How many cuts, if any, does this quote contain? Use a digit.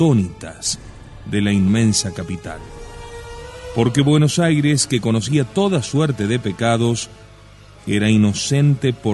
1